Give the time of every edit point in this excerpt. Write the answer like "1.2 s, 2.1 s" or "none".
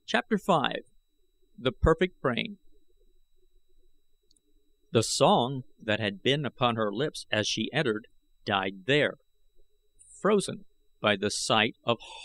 none